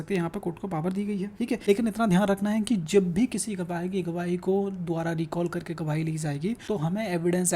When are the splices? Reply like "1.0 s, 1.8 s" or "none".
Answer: 1.5 s, 6.6 s